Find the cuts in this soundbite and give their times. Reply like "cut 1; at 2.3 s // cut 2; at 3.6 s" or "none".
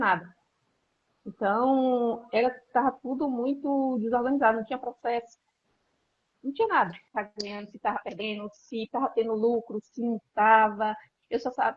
cut 1; at 7.0 s